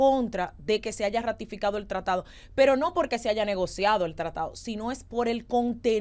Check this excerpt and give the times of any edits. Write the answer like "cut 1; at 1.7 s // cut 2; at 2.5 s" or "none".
none

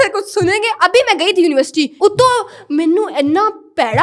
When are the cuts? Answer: none

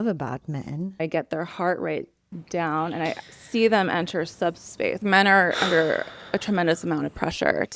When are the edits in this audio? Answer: cut 1; at 1.0 s // cut 2; at 3.3 s // cut 3; at 5.0 s

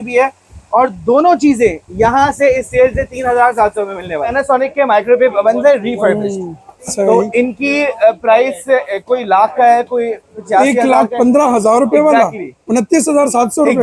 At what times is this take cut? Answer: cut 1; at 4.3 s

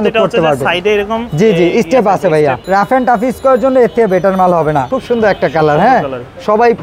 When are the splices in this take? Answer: cut 1; at 2.6 s // cut 2; at 4.9 s

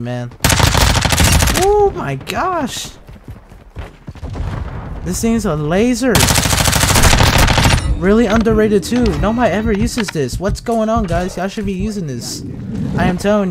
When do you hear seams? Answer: none

